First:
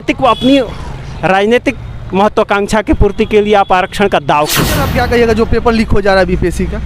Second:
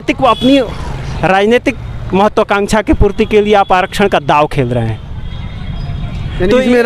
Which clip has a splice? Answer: first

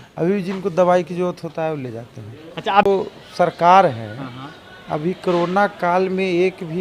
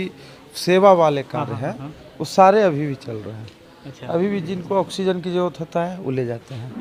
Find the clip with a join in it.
first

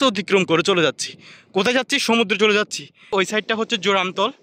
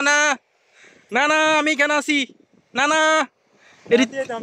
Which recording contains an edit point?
first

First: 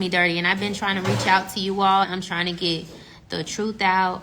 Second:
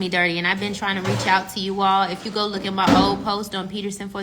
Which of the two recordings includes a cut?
first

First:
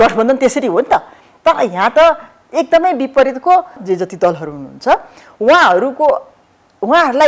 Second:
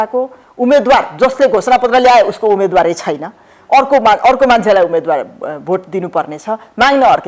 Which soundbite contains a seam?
first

